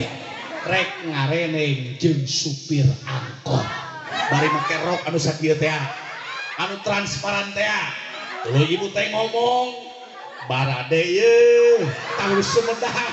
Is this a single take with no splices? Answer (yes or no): no